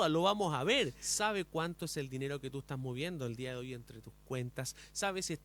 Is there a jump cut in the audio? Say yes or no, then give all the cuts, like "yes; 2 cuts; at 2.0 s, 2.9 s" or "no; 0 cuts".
yes; 1 cut; at 1.0 s